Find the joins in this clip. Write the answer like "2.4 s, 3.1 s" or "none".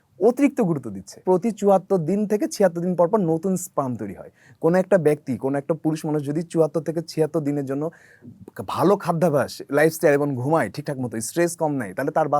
1.2 s